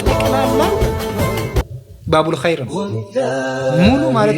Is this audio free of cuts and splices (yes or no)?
yes